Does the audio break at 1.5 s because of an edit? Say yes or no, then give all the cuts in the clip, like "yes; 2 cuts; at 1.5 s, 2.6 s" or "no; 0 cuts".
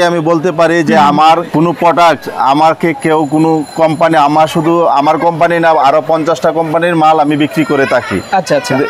yes; 1 cut; at 1.5 s